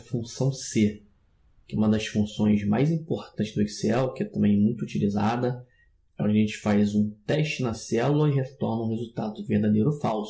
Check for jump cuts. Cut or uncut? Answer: uncut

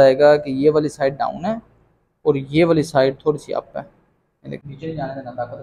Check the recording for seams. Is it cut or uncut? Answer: cut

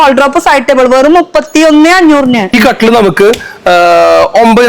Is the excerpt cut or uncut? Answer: cut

